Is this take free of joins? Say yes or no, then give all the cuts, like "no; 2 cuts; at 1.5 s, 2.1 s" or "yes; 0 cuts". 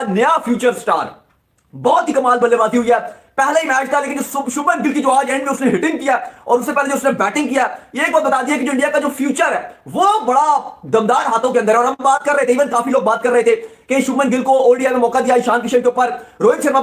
yes; 0 cuts